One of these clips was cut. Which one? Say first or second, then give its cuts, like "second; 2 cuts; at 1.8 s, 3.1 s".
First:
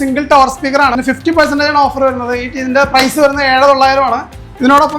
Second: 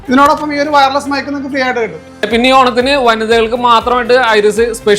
first; 1 cut; at 1.0 s